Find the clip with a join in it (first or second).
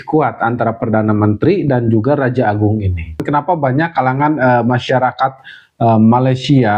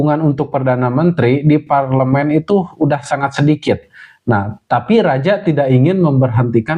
first